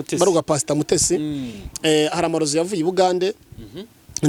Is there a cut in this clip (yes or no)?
no